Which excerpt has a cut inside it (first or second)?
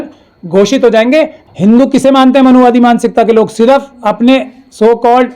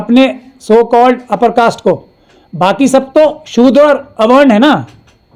first